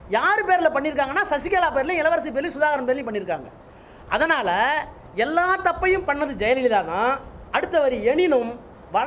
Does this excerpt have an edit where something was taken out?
no; 0 cuts

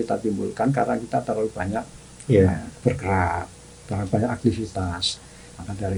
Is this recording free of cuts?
yes; 0 cuts

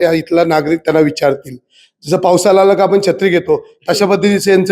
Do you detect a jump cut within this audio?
no; 0 cuts

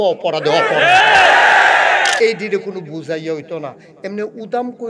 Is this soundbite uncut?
no; 1 cut; at 2.1 s

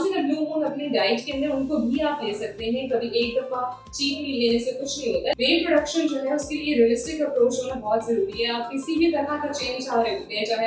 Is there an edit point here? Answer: yes; 1 cut; at 5.3 s

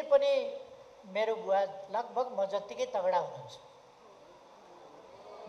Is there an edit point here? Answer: no; 0 cuts

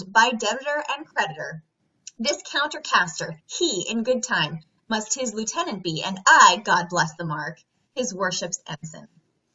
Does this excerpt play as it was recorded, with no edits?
yes; 0 cuts

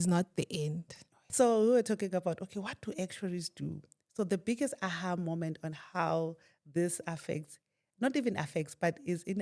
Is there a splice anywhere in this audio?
yes; 1 cut; at 1.3 s

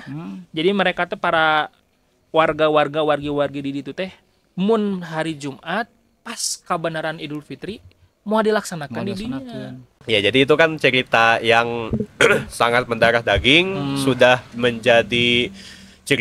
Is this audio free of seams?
no; 1 cut; at 10.0 s

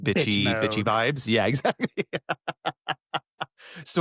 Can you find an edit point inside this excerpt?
no; 0 cuts

